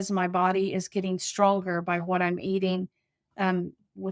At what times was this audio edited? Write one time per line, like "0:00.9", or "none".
none